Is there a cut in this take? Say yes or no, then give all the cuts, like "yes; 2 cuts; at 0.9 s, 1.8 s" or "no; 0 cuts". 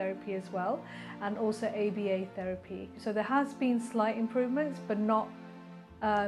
yes; 1 cut; at 3.0 s